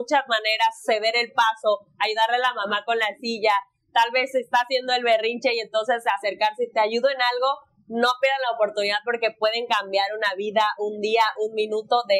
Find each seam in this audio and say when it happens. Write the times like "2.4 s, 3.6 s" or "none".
none

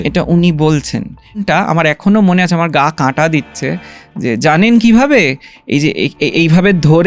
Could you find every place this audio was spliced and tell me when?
1.4 s

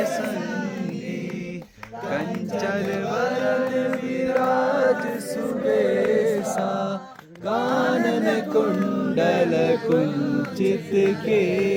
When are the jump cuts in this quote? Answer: none

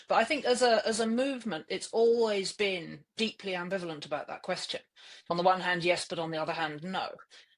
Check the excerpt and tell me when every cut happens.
5.3 s

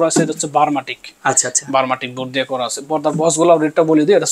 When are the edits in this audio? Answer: none

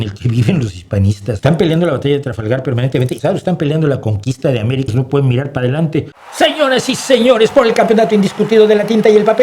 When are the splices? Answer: 1.4 s, 3.1 s, 4.9 s, 6.2 s

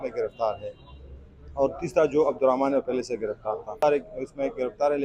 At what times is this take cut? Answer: 3.7 s

